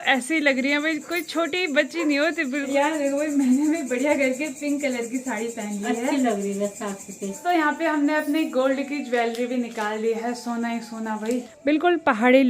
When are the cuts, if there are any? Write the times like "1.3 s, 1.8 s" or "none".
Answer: 2.7 s, 7.3 s, 11.5 s